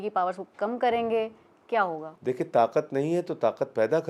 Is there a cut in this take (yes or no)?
yes